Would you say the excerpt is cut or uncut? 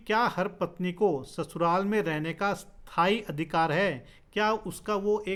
uncut